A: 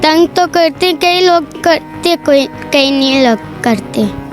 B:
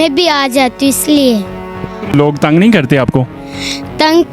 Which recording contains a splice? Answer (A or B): B